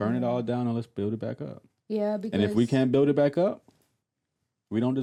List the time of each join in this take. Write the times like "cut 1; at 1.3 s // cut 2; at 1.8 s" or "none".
none